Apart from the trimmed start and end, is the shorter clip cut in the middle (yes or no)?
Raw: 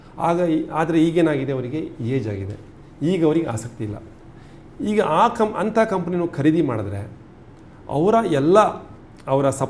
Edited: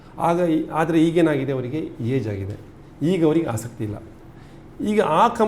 no